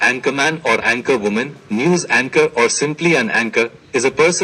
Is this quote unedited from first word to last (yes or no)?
yes